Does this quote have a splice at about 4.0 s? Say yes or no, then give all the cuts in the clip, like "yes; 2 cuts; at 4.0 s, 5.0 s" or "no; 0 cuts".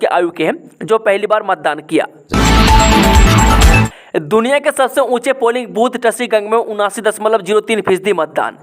yes; 2 cuts; at 2.2 s, 4.0 s